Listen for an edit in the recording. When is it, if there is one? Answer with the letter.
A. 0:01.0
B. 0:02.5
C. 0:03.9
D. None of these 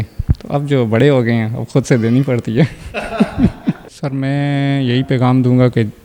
C